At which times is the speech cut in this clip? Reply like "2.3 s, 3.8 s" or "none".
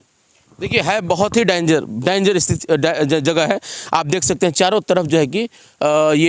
none

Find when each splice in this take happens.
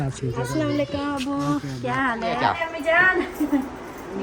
2.4 s

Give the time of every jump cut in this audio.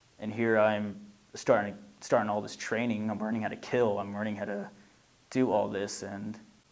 none

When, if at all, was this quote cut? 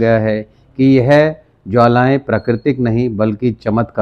none

